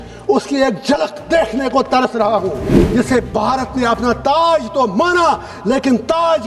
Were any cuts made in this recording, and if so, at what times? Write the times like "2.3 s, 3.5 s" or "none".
2.8 s